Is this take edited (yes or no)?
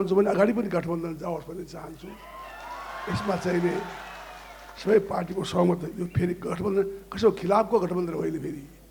no